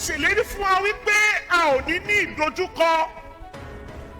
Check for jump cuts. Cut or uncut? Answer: uncut